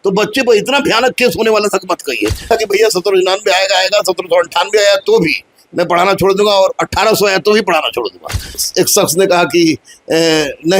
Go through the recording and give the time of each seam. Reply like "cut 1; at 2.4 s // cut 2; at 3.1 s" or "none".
cut 1; at 2.4 s // cut 2; at 8.6 s